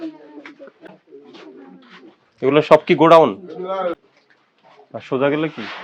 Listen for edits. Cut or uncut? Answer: cut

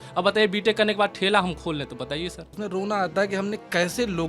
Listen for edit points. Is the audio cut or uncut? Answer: cut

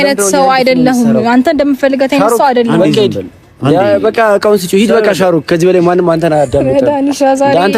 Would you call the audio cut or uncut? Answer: cut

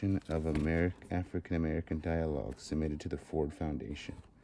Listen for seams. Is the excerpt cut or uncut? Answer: uncut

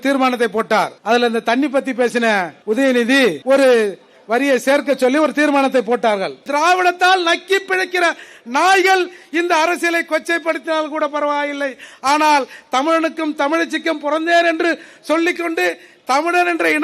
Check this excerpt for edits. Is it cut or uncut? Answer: cut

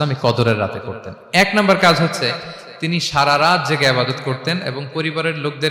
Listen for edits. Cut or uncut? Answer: uncut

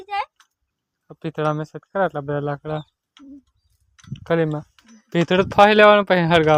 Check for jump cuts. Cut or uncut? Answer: uncut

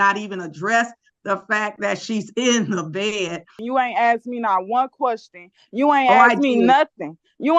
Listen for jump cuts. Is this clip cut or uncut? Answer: cut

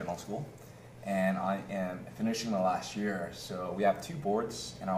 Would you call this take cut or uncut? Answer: cut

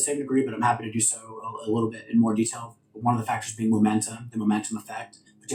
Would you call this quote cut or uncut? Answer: uncut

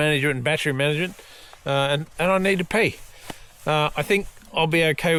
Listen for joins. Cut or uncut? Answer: uncut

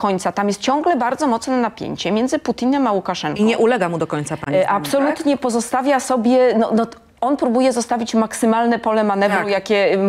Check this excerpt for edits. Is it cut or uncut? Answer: uncut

